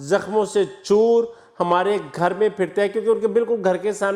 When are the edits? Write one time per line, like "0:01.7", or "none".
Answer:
none